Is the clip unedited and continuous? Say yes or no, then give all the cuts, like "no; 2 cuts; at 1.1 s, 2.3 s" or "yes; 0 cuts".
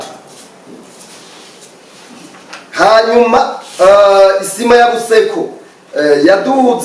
yes; 0 cuts